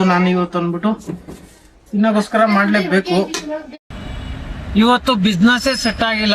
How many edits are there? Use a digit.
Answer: 1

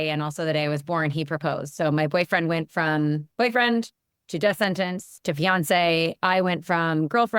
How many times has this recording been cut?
1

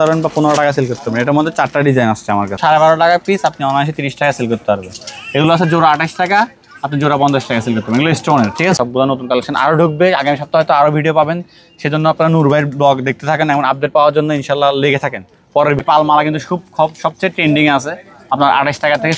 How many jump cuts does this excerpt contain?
3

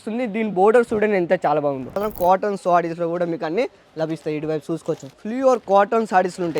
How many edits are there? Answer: 2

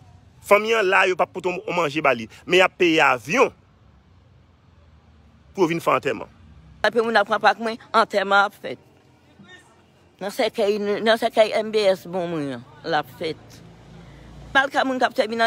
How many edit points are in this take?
2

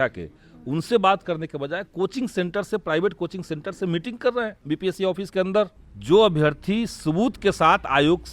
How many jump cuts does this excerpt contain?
2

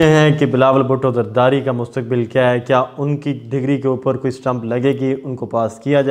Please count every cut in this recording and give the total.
0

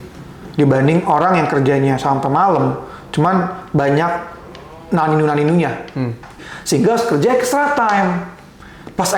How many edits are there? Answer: 1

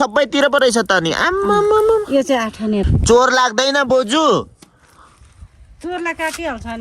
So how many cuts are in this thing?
1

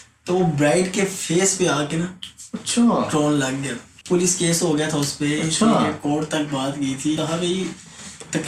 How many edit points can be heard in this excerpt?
2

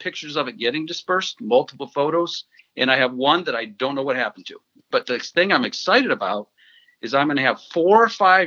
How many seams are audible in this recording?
1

